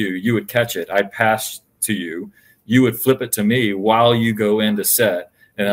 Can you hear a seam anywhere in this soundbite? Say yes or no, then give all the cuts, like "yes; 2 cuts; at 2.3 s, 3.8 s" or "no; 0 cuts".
no; 0 cuts